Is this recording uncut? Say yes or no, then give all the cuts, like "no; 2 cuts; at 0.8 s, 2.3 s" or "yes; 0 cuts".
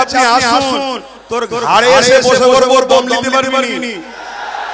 yes; 0 cuts